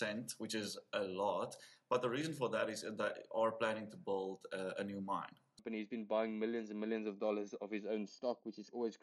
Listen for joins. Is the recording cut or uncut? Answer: cut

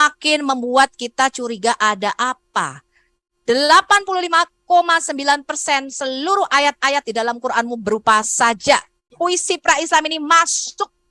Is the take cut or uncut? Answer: cut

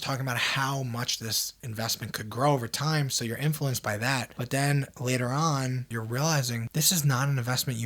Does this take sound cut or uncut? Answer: cut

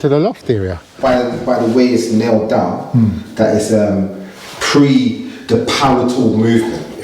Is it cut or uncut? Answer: cut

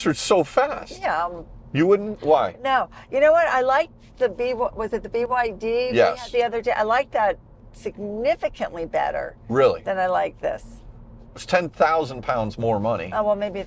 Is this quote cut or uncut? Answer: uncut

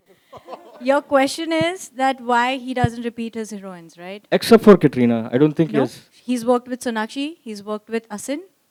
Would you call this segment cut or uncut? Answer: uncut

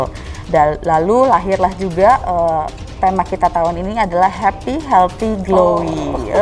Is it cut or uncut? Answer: uncut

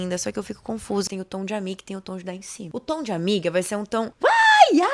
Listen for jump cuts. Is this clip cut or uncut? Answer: cut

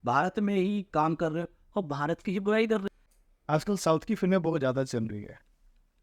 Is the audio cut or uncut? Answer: cut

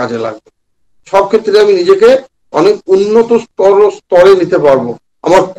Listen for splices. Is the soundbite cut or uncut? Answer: uncut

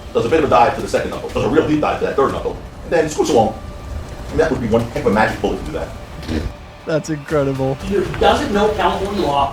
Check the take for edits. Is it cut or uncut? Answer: cut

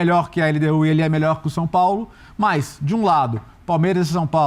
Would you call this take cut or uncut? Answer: uncut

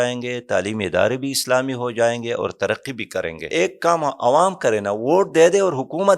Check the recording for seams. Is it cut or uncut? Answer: cut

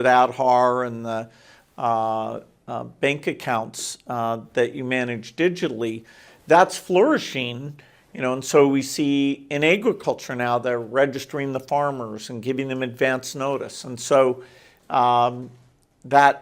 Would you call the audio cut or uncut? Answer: uncut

